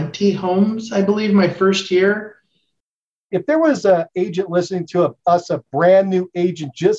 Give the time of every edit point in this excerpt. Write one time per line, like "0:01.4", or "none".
0:03.2

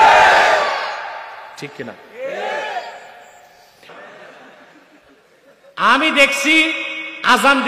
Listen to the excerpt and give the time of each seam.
none

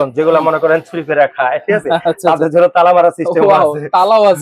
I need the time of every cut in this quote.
none

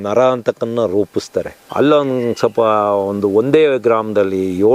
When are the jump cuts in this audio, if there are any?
0:01.6

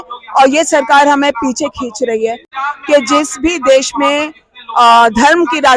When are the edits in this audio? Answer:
0:02.5

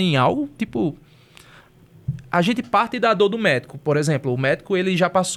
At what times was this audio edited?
none

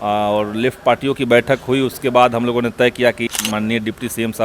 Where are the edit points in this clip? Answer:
0:03.3

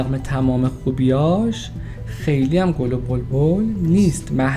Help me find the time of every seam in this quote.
none

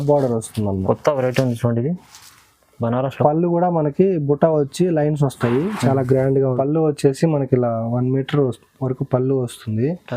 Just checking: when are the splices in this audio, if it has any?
0:06.5

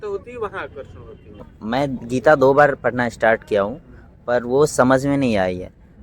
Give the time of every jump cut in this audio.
0:01.5

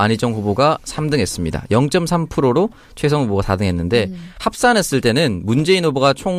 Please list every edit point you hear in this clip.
0:04.0

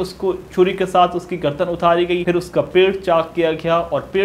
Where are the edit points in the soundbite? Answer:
0:02.2

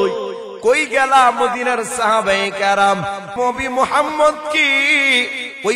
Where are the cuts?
0:03.3

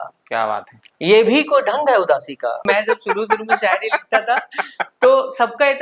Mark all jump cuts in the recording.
0:02.6

